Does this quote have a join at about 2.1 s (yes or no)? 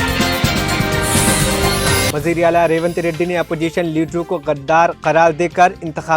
yes